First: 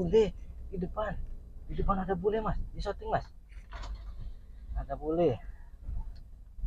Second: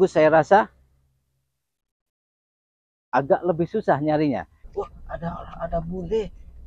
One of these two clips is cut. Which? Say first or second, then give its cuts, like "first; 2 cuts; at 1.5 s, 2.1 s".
second; 1 cut; at 4.6 s